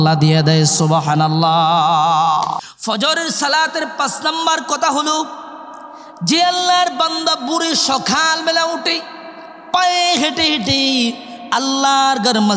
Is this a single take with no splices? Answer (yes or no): no